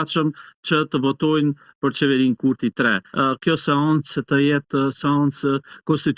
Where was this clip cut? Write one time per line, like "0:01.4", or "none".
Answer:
0:03.0